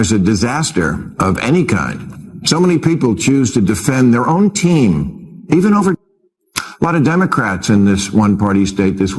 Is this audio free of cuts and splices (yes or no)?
yes